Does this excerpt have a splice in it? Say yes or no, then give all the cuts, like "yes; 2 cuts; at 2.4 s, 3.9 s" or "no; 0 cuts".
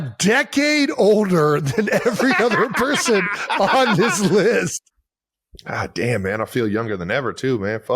no; 0 cuts